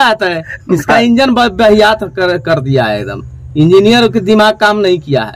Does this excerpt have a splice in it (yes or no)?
no